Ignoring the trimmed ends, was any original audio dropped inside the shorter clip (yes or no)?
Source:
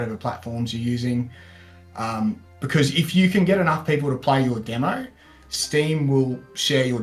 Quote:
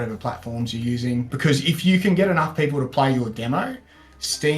yes